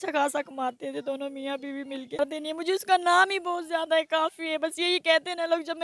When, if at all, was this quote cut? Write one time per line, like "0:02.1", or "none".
0:02.2